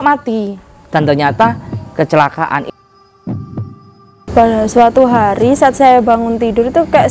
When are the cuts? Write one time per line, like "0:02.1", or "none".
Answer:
0:02.6
0:04.2